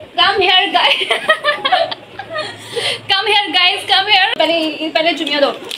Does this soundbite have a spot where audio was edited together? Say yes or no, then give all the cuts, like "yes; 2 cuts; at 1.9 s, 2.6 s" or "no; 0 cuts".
yes; 1 cut; at 4.4 s